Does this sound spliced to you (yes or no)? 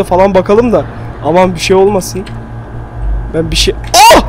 no